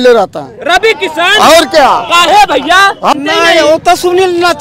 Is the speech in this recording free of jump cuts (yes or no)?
no